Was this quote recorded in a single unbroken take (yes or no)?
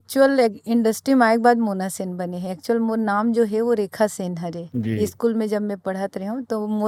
yes